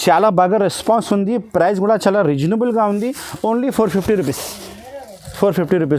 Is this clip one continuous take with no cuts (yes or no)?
yes